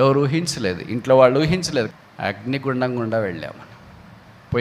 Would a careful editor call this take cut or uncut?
cut